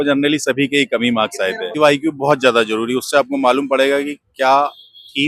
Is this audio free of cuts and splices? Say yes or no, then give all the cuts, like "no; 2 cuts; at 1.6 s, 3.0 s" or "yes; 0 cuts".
no; 1 cut; at 1.7 s